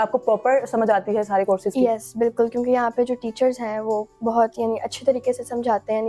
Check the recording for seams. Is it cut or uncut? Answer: uncut